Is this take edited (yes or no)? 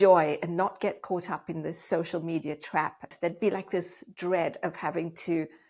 yes